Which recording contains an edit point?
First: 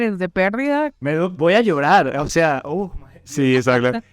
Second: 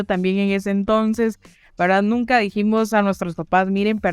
first; 1 cut; at 0.9 s

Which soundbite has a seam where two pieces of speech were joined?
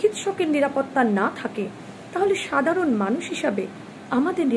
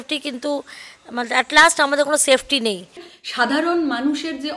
second; 1 cut; at 2.9 s

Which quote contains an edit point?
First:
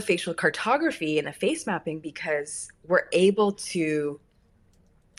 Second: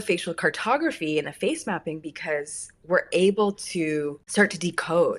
second; 1 cut; at 4.2 s

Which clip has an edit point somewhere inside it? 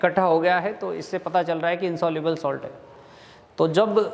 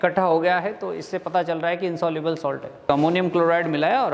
second; 1 cut; at 2.9 s

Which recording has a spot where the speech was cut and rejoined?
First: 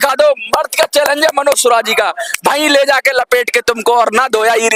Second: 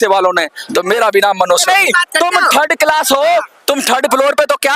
second; 1 cut; at 1.6 s

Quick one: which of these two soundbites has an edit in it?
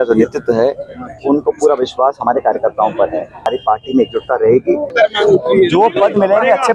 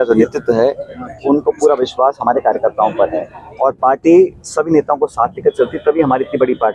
first; 2 cuts; at 3.4 s, 4.9 s

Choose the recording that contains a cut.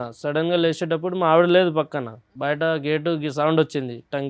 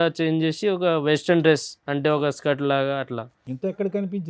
first; 1 cut; at 2.3 s

